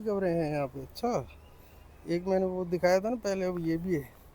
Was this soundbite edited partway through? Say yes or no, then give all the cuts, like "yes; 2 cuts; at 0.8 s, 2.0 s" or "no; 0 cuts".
no; 0 cuts